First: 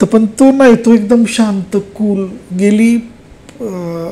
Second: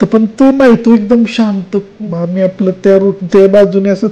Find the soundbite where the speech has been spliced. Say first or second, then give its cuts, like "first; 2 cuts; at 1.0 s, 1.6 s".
second; 1 cut; at 2.0 s